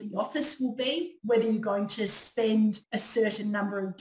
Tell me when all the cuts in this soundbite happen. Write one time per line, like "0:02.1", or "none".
0:02.9

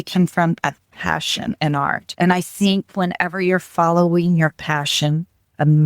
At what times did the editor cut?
0:02.1

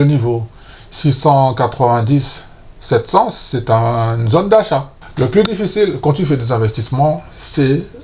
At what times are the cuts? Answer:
0:05.0

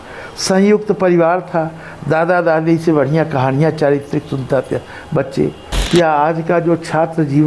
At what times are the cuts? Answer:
0:05.7

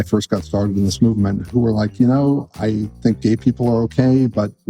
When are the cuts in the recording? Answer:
0:01.4

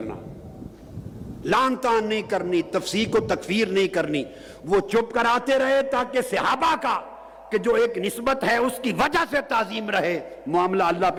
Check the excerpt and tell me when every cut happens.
none

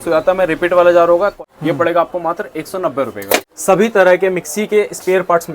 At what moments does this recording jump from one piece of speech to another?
0:01.4
0:03.5

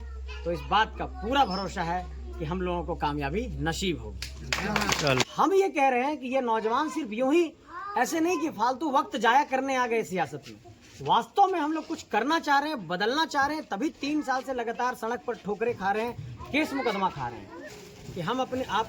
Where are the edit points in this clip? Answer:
0:05.3
0:17.8

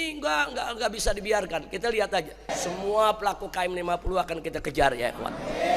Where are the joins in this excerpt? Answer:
0:02.5

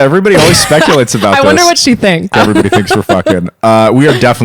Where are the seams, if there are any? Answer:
0:02.3

